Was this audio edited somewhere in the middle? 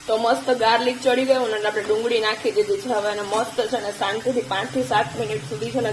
no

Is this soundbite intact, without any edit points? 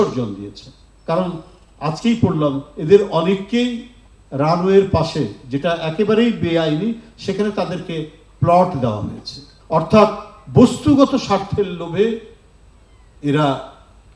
yes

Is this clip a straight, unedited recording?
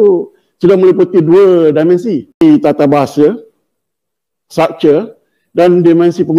no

